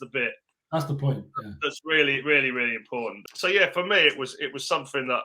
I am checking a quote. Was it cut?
yes; 1 cut; at 3.2 s

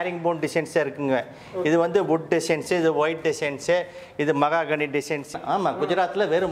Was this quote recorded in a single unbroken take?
no; 1 cut; at 5.3 s

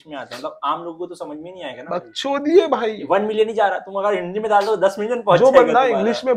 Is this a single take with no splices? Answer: yes; 0 cuts

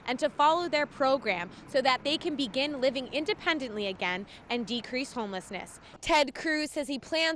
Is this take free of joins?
no; 1 cut; at 5.9 s

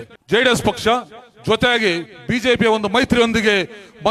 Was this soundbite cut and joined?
no; 0 cuts

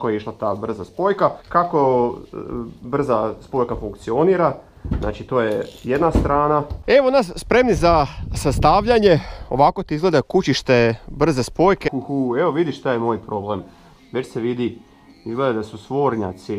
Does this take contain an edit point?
yes; 3 cuts; at 1.4 s, 6.8 s, 11.9 s

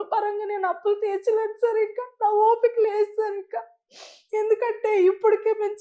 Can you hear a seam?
no; 0 cuts

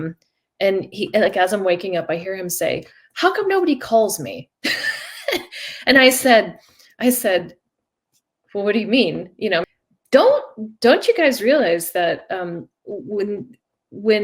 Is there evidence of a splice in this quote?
yes; 1 cut; at 9.8 s

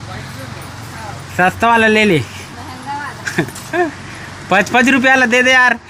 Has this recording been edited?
no; 0 cuts

